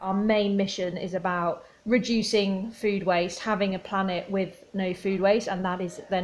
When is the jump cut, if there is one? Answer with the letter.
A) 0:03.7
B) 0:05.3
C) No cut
C